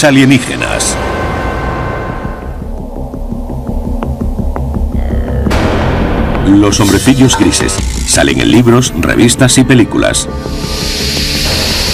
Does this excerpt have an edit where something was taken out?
no; 0 cuts

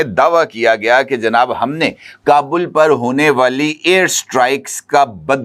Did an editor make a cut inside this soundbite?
no; 0 cuts

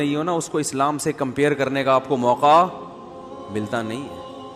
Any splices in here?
no; 0 cuts

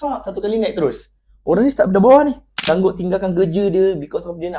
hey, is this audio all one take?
no; 1 cut; at 2.5 s

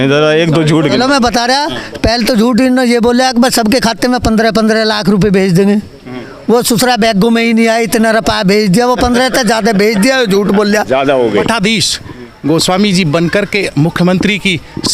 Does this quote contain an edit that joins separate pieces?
yes; 1 cut; at 11.4 s

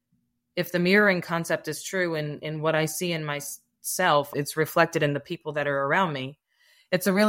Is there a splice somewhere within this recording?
yes; 1 cut; at 4.3 s

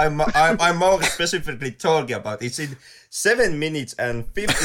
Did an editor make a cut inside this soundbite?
no; 0 cuts

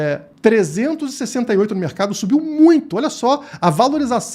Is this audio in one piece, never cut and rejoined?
yes; 0 cuts

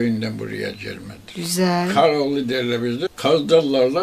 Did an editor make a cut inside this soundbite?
yes; 1 cut; at 3.1 s

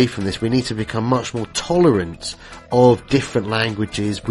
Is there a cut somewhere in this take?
no; 0 cuts

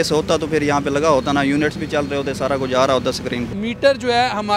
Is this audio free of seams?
no; 1 cut; at 3.5 s

